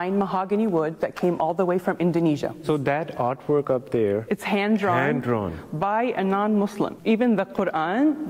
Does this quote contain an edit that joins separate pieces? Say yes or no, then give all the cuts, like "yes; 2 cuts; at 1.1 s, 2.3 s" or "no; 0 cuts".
yes; 4 cuts; at 1.0 s, 2.6 s, 4.2 s, 7.0 s